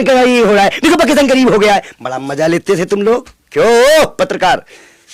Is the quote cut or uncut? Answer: uncut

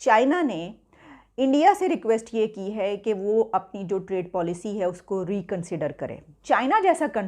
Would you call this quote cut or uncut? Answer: cut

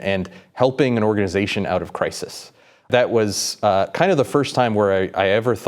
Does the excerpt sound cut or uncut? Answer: cut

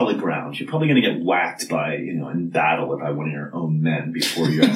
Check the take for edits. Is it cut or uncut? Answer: uncut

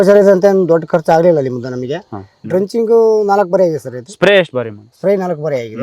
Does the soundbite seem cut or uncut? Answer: cut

